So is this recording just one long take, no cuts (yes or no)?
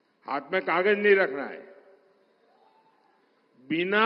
yes